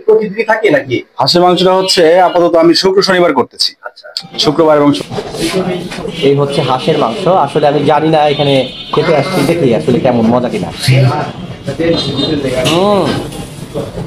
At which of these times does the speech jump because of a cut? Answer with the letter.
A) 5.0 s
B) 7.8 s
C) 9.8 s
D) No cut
A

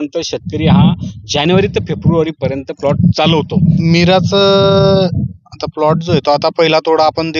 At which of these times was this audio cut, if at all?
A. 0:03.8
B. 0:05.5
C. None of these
A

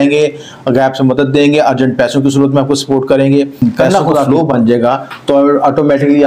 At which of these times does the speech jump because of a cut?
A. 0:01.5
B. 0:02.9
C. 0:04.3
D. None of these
C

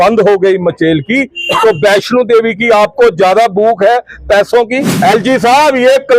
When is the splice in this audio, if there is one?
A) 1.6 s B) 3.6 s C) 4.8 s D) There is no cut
C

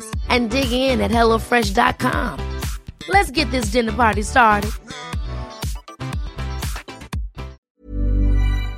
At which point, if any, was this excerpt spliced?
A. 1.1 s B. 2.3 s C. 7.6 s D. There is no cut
C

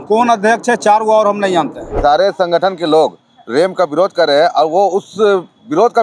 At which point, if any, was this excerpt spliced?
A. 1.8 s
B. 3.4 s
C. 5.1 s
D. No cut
A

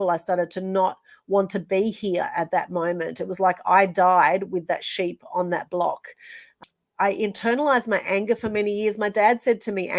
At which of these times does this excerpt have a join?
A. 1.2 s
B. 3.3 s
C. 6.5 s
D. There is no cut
C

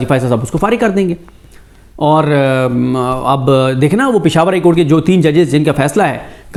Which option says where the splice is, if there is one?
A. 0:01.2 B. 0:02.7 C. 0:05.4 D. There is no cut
D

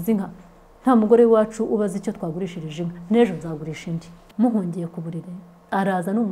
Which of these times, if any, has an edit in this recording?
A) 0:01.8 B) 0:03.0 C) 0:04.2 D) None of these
C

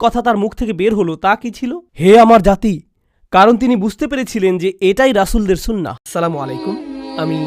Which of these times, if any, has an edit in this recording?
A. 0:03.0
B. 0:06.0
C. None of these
B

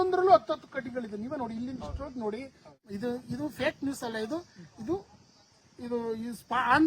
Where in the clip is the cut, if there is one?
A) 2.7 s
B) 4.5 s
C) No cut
A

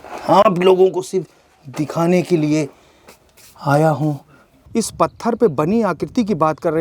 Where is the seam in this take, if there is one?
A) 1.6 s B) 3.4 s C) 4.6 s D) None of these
C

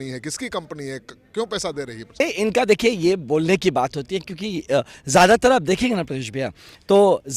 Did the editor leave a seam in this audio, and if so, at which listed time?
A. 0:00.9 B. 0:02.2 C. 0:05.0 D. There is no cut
B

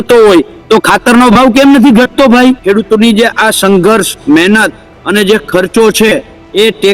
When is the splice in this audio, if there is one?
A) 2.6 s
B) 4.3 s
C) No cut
A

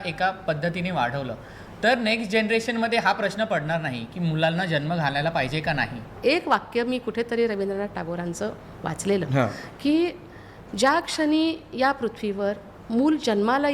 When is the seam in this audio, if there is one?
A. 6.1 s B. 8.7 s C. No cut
A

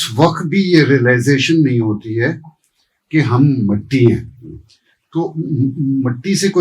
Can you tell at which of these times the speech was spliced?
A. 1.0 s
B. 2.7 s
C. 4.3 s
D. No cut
D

